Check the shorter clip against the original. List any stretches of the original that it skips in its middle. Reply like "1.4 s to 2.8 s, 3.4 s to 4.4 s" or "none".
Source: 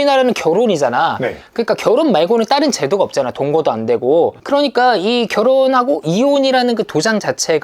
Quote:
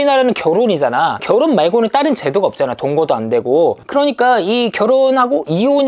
1.2 s to 1.8 s